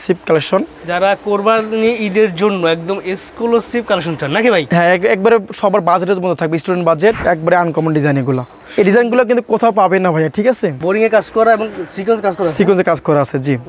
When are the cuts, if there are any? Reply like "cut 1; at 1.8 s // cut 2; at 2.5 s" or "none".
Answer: cut 1; at 7.2 s // cut 2; at 8.5 s // cut 3; at 10.8 s